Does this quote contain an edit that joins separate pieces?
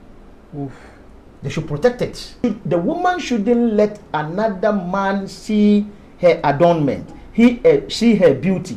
yes; 1 cut; at 2.4 s

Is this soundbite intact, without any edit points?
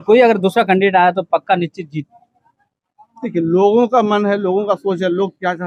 yes; 0 cuts

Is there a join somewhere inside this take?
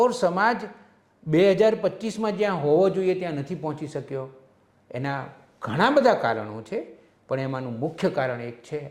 no; 0 cuts

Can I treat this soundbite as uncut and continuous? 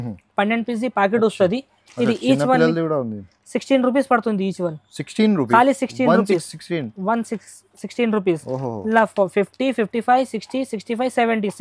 yes; 0 cuts

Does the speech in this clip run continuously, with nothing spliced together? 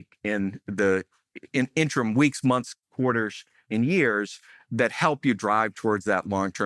yes; 0 cuts

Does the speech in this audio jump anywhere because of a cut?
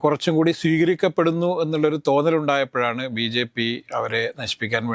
no; 0 cuts

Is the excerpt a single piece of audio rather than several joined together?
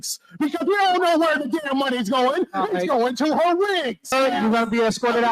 no; 1 cut; at 4.1 s

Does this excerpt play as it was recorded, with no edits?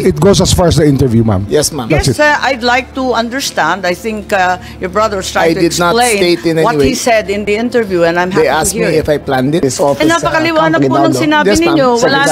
no; 1 cut; at 9.6 s

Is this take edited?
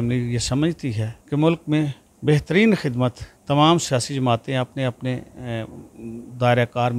yes; 3 cuts; at 1.1 s, 2.1 s, 3.3 s

